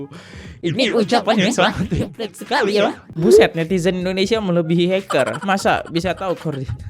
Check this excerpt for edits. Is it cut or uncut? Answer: cut